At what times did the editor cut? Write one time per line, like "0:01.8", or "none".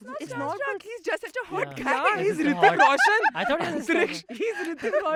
none

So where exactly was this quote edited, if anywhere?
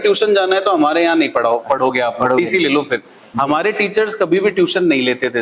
0:03.2

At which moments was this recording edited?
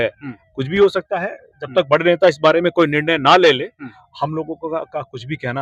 none

